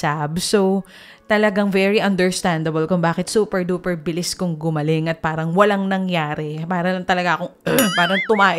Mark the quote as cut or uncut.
uncut